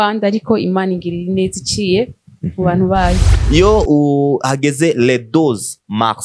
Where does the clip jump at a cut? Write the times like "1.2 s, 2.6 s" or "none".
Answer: 3.3 s